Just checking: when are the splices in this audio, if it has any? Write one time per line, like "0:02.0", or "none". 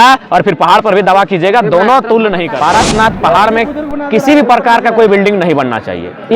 0:02.5